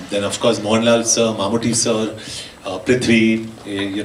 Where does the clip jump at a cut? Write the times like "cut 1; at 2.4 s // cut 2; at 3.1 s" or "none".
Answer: none